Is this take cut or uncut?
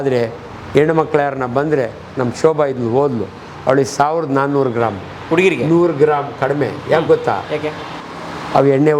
uncut